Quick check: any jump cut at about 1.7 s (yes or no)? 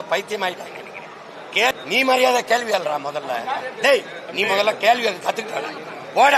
yes